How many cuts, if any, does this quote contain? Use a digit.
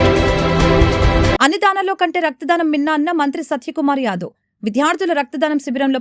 1